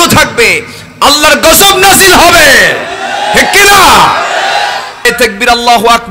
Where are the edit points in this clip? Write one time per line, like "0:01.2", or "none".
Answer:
0:05.0